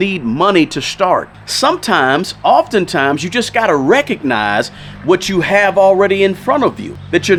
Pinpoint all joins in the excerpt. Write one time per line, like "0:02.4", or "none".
none